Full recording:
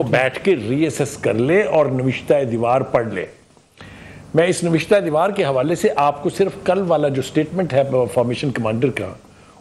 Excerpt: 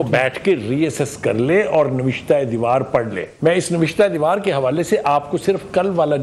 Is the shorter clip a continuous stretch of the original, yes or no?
no